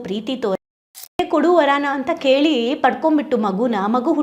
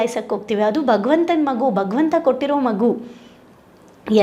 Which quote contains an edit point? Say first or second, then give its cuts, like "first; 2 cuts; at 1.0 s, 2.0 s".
first; 1 cut; at 1.1 s